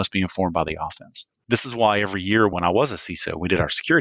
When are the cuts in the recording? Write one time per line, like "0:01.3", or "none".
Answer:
0:01.3